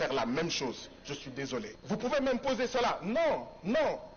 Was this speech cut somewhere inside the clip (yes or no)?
yes